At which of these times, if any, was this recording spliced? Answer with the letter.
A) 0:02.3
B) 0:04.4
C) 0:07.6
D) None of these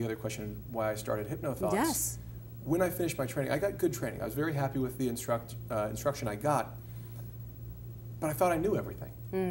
D